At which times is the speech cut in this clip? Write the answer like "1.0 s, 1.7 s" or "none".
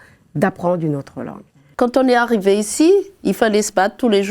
1.7 s